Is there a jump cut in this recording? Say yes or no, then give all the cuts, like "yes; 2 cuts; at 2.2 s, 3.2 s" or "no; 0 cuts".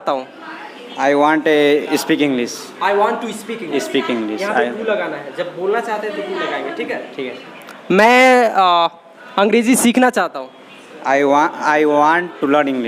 no; 0 cuts